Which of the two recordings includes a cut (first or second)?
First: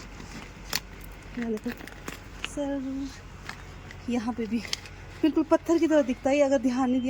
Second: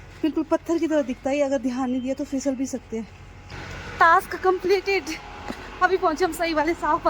second